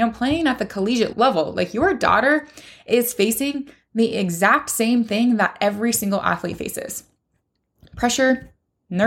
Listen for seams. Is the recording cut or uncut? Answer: cut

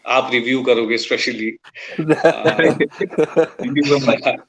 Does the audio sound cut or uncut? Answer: uncut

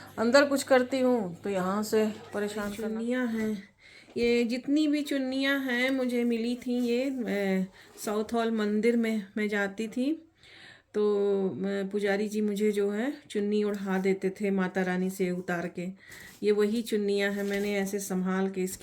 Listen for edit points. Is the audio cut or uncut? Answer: cut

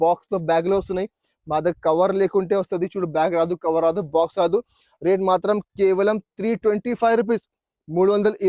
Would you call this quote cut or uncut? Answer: uncut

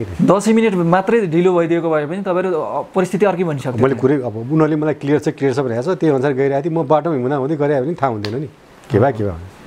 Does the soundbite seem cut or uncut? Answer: uncut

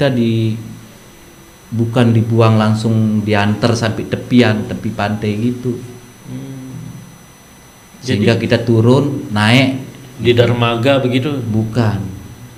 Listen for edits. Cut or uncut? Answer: uncut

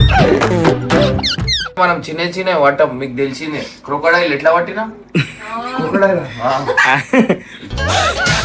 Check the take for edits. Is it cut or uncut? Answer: cut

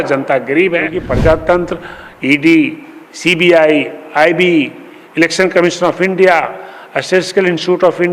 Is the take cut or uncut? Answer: cut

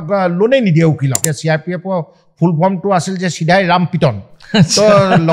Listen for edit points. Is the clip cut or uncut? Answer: cut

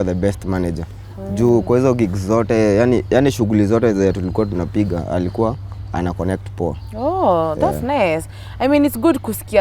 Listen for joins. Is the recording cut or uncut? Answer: uncut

